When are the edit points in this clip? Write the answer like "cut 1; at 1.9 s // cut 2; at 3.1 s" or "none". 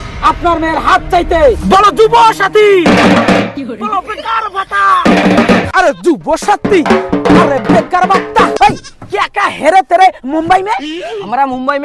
cut 1; at 5.7 s // cut 2; at 8.5 s